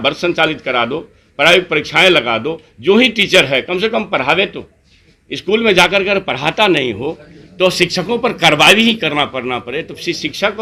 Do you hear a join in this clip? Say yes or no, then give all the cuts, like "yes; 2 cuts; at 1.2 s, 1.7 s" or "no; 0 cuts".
no; 0 cuts